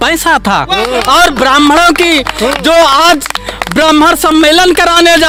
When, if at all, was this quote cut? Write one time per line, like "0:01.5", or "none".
none